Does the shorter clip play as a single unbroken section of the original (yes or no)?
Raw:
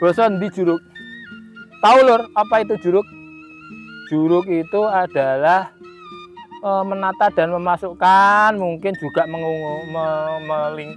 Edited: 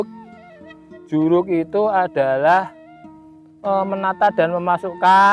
yes